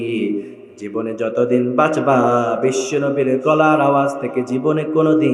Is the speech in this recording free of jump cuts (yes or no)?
yes